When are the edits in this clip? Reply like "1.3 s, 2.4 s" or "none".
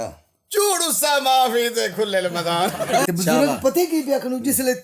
3.1 s